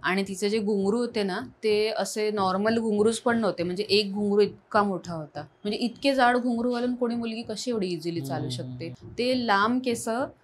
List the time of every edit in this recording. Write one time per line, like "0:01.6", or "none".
0:08.9